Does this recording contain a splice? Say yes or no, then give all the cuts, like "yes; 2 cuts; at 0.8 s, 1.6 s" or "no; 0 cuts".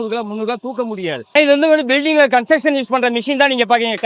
yes; 1 cut; at 1.2 s